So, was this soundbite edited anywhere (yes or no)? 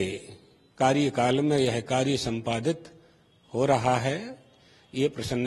no